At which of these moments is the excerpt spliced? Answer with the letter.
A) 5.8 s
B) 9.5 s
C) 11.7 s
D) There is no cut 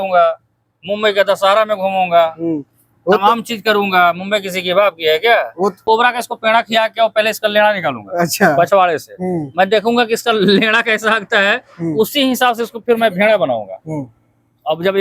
A